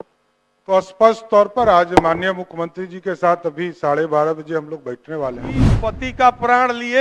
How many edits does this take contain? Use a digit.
1